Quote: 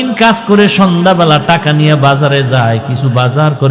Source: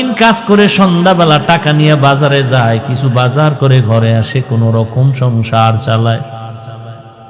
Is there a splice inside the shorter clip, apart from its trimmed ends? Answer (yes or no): no